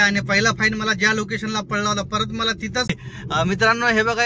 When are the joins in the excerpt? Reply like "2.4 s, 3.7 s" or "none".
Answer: 3.1 s